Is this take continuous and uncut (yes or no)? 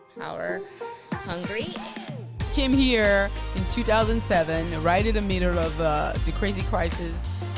no